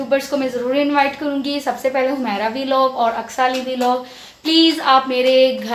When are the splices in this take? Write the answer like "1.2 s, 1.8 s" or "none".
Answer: none